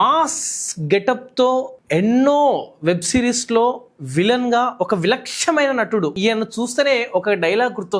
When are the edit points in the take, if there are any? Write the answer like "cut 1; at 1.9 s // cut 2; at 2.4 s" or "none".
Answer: cut 1; at 6.1 s